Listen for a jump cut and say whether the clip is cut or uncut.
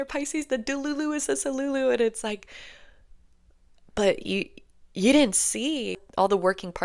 cut